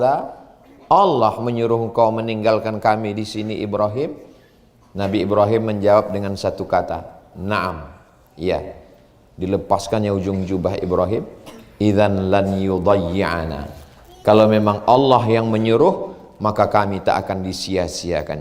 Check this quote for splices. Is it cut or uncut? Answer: uncut